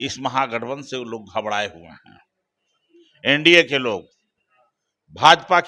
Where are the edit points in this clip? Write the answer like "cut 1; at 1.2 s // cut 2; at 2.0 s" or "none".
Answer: none